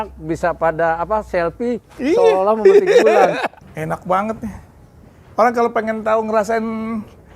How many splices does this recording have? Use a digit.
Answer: 1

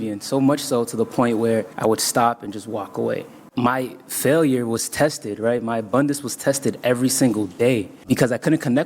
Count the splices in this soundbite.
3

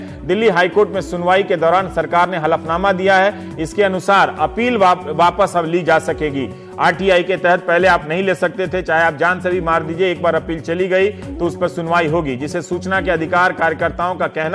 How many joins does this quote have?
1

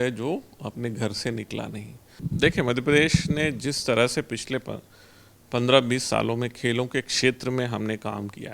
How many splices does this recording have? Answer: 1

